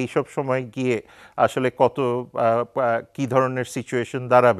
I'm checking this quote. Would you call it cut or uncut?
uncut